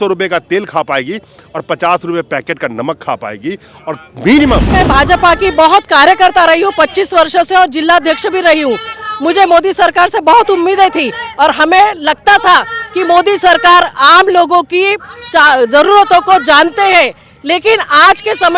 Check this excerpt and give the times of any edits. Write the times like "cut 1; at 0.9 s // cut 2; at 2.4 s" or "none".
cut 1; at 4.7 s